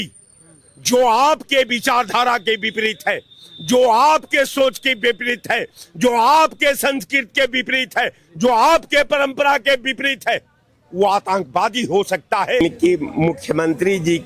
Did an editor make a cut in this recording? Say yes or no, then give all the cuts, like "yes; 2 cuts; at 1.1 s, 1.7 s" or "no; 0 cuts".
yes; 1 cut; at 12.6 s